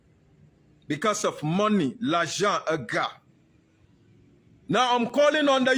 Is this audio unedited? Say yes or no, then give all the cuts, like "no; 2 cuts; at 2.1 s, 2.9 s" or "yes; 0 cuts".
yes; 0 cuts